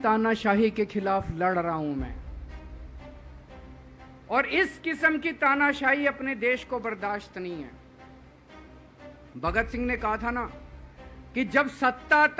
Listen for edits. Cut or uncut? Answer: cut